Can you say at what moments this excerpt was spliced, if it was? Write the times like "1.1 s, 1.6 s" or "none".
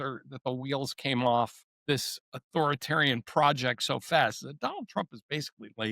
1.7 s

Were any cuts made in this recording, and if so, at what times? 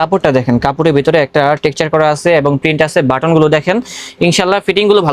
none

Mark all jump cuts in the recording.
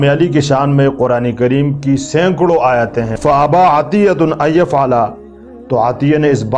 3.1 s

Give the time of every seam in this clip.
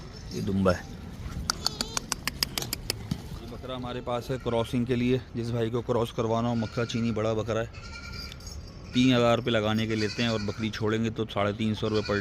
3.8 s

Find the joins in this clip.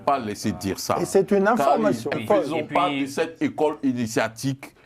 2.1 s

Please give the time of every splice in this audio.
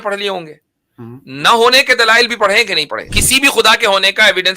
3.2 s

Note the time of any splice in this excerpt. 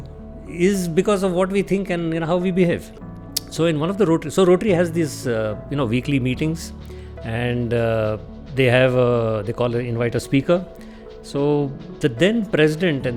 none

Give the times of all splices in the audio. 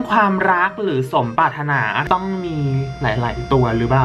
2.0 s

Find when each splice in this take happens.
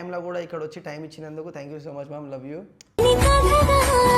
none

